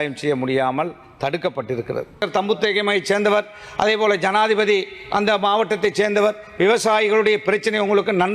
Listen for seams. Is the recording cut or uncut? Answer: cut